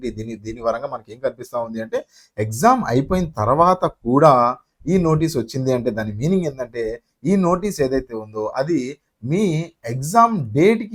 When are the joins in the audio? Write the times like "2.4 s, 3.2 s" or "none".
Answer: none

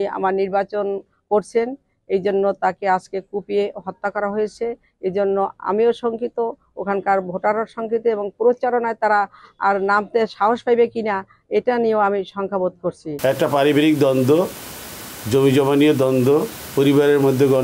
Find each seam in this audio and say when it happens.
13.1 s

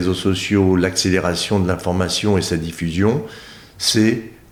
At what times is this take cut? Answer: none

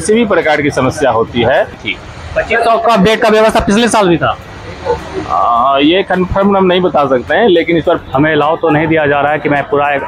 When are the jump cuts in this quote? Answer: 1.8 s, 8.0 s

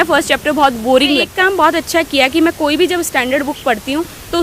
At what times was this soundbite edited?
1.3 s

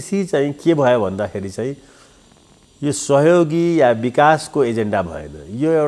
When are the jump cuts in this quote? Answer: none

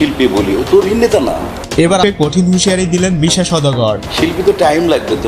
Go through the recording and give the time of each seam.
2.0 s

